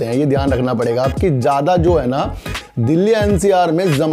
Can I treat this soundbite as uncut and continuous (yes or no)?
yes